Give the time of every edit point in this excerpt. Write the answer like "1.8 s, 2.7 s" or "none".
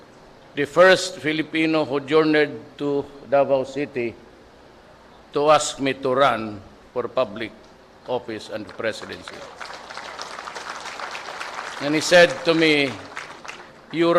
12.5 s